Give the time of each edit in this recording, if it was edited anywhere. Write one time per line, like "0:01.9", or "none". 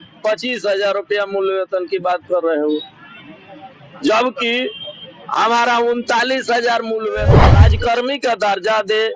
0:07.4